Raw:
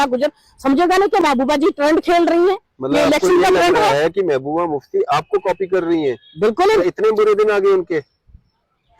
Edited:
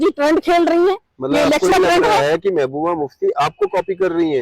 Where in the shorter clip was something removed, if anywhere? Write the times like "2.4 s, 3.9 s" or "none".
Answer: 1.7 s

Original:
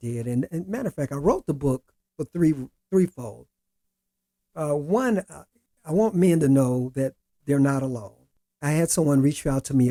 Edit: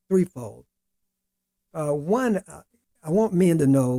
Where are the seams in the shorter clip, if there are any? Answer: none

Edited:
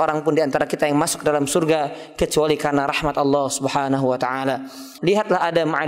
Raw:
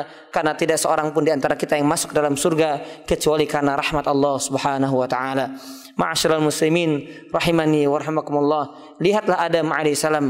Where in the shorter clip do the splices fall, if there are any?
4.8 s

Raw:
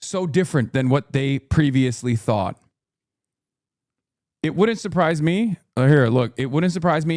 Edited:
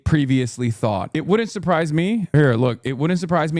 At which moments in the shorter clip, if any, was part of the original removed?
1.1 s, 2.3 s

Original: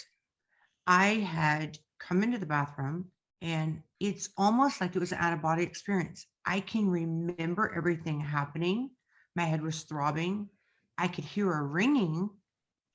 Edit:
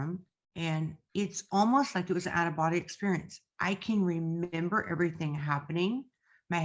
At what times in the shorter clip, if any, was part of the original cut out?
none

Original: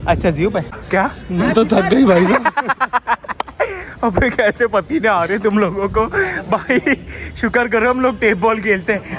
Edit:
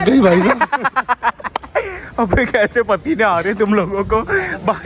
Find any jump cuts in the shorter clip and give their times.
none

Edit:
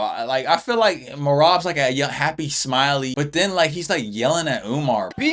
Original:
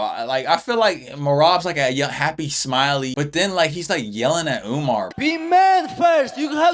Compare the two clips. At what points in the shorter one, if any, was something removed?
none

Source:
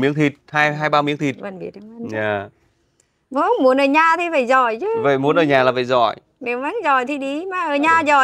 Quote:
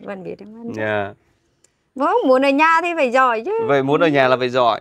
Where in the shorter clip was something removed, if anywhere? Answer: none

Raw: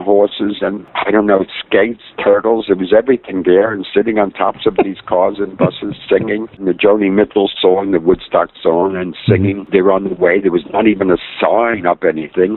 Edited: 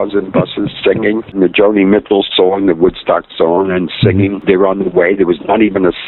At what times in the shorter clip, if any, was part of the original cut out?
none

